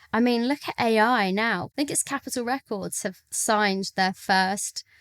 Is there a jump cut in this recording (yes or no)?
yes